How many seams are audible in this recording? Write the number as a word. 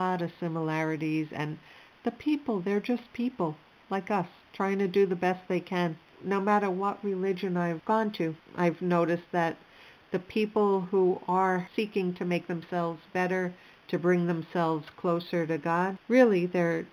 zero